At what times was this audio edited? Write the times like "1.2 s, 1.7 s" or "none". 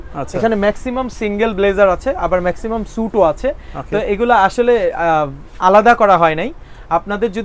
none

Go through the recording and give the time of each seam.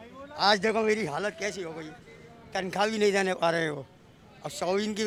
none

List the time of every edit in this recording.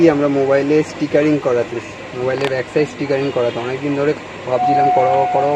none

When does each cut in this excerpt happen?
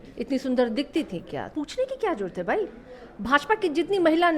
1.5 s

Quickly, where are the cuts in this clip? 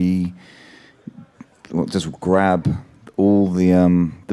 1.9 s

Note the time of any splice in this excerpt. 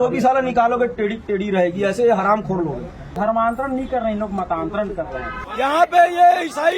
3.0 s, 5.4 s

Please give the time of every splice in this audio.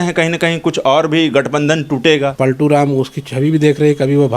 2.3 s

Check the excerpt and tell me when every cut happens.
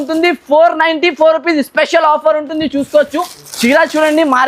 none

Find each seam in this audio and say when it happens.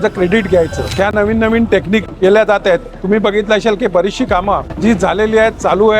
0.9 s

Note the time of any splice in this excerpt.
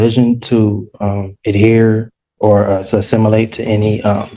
none

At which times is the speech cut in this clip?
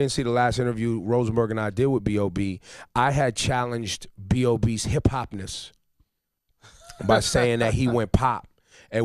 3.1 s

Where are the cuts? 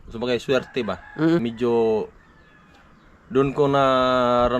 1.4 s

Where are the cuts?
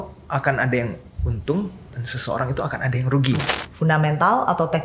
3.6 s

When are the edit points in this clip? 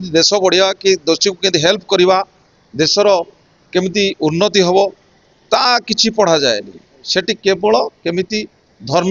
none

